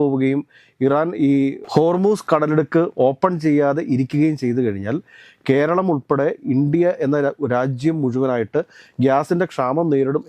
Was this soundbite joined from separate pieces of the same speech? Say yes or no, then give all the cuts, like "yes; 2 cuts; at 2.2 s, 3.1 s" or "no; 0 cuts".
no; 0 cuts